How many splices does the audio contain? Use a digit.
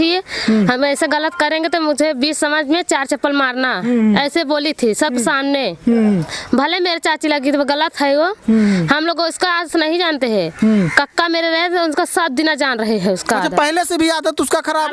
0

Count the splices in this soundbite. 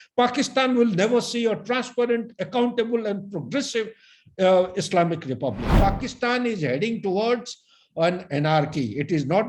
1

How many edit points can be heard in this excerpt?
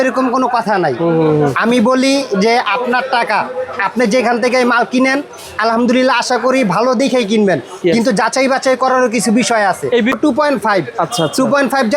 1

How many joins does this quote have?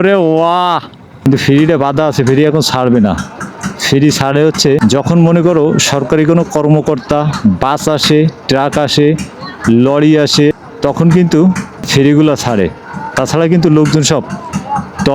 2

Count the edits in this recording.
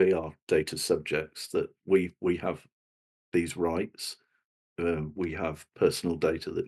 0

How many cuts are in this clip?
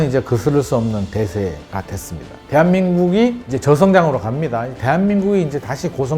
1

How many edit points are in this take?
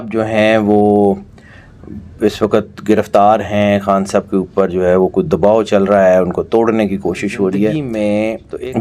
1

